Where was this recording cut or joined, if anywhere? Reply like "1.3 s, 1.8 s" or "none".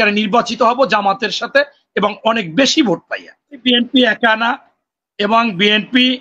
3.6 s